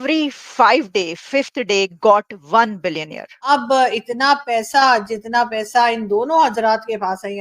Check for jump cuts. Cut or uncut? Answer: cut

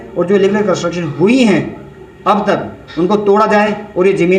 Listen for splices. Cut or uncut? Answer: uncut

